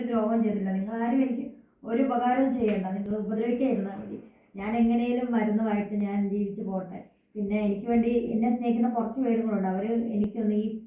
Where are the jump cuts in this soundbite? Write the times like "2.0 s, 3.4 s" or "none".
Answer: none